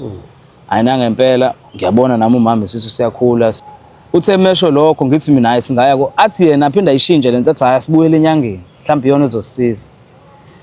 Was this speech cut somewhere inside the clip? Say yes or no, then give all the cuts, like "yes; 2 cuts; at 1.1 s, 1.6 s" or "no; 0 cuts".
yes; 1 cut; at 3.6 s